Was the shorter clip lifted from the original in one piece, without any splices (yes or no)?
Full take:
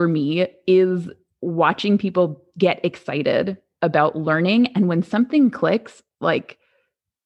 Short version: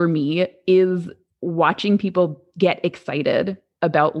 yes